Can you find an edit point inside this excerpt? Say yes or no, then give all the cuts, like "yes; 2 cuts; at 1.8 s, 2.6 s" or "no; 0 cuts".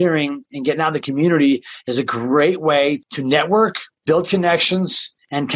yes; 2 cuts; at 3.0 s, 3.9 s